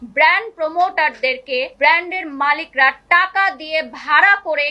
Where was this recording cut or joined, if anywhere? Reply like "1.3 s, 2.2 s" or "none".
1.7 s

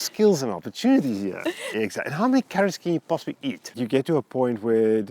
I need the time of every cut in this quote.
1.6 s, 3.7 s

